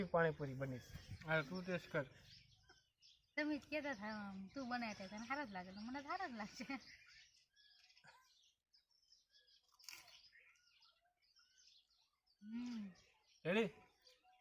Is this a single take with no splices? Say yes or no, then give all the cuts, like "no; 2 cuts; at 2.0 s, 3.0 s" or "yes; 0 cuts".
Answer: no; 1 cut; at 1.1 s